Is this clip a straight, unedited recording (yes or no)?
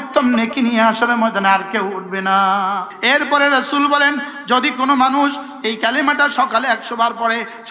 no